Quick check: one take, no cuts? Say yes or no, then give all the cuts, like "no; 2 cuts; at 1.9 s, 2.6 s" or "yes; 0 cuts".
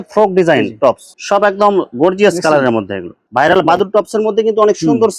yes; 0 cuts